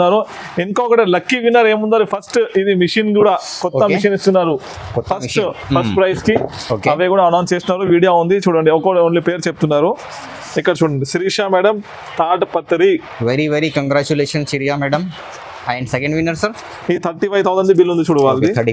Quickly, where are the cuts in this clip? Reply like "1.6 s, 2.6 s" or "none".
none